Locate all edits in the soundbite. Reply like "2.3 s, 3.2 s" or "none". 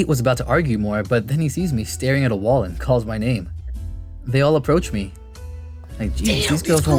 none